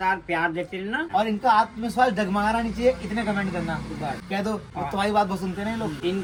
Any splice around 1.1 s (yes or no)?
no